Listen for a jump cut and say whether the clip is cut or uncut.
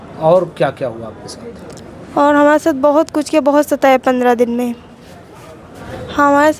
uncut